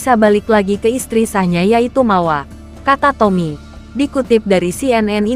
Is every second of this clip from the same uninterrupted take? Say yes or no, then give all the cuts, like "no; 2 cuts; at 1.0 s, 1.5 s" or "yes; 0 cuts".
yes; 0 cuts